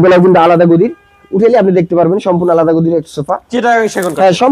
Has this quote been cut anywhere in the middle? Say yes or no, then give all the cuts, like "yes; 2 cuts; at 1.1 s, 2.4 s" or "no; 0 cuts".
no; 0 cuts